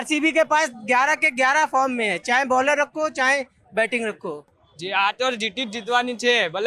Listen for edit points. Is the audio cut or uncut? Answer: cut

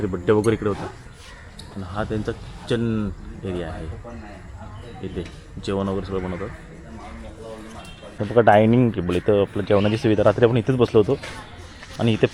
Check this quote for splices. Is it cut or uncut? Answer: cut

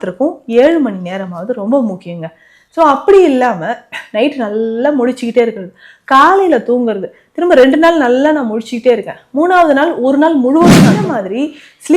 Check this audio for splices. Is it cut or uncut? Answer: cut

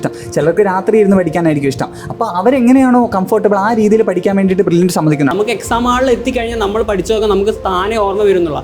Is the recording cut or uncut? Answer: cut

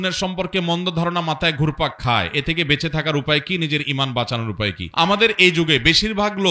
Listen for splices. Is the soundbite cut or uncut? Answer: uncut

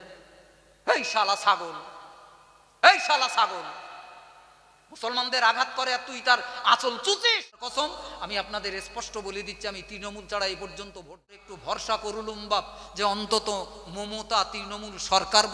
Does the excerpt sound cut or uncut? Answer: cut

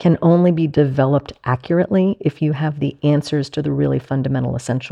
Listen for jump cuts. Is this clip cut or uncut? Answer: uncut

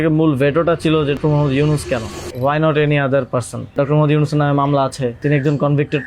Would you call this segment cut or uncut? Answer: cut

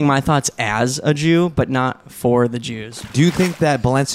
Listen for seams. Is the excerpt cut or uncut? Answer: cut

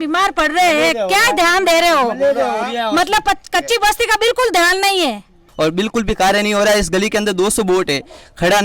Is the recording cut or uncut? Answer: cut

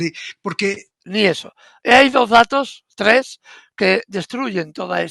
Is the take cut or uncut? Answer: cut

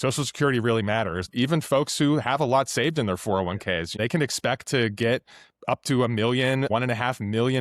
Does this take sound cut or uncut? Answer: cut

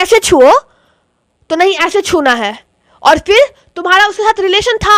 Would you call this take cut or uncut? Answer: uncut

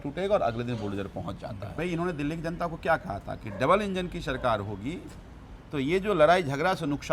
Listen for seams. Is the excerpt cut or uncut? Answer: cut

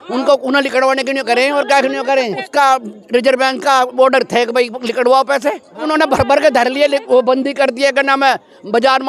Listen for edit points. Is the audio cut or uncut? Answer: cut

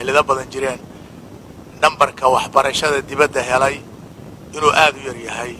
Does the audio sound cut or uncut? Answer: uncut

